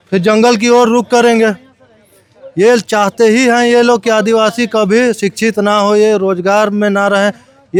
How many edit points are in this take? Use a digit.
0